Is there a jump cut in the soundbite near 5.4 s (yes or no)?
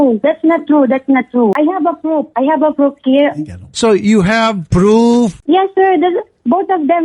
yes